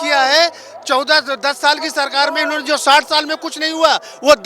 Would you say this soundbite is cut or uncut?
uncut